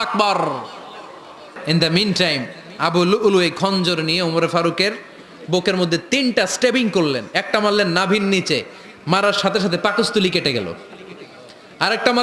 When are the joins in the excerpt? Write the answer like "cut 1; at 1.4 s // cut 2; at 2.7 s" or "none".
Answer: cut 1; at 1.6 s